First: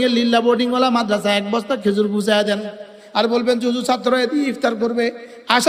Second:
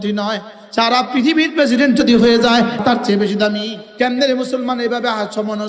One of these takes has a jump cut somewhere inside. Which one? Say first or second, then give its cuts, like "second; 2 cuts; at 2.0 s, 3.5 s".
second; 2 cuts; at 2.8 s, 3.8 s